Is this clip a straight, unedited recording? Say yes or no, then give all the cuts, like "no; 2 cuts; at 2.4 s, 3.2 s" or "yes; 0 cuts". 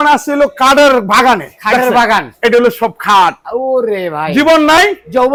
yes; 0 cuts